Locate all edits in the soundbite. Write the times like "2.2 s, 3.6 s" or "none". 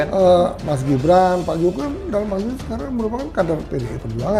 none

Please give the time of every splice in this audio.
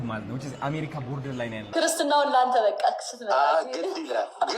1.6 s

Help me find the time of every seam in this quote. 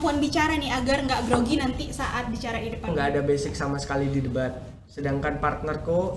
2.9 s

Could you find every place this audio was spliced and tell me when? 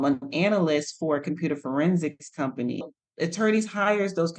2.9 s

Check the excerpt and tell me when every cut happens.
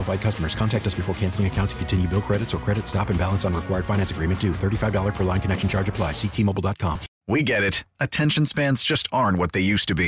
7.1 s

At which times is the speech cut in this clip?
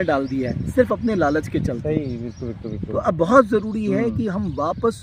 none

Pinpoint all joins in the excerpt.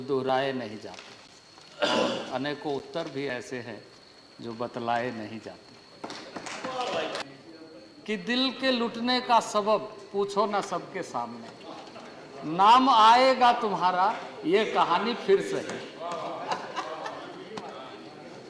7.2 s

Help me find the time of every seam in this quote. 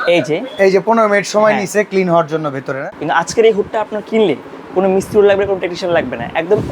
2.8 s

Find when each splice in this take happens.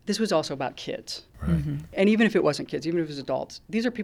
1.9 s

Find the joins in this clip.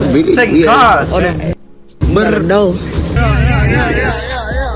3.2 s

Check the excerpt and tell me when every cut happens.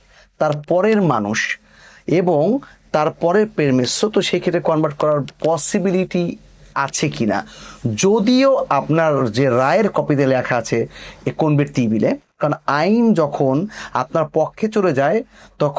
12.4 s

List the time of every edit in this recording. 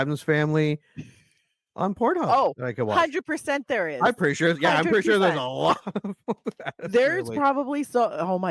none

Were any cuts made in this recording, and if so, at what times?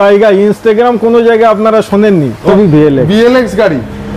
2.4 s

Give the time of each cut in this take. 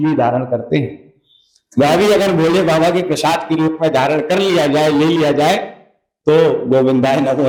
none

